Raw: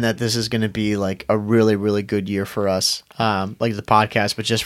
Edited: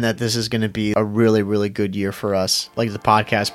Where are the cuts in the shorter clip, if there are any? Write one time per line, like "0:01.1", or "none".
0:00.9
0:02.7